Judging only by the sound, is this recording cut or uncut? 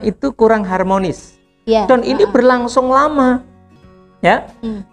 uncut